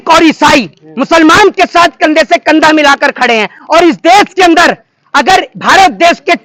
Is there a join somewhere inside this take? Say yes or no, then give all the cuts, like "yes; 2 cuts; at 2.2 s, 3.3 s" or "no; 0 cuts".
no; 0 cuts